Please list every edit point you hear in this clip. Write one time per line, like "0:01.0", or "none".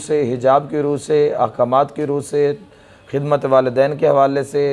none